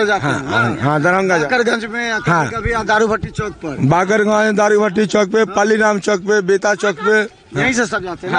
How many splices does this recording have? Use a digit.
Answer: 0